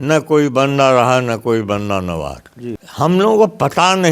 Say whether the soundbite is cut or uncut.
cut